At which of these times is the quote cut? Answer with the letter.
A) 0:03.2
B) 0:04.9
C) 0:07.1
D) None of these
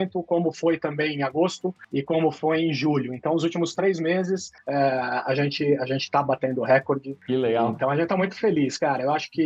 D